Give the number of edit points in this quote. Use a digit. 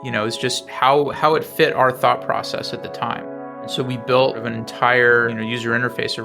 3